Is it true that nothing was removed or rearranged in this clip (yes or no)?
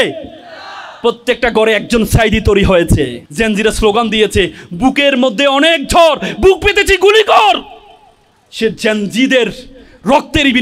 no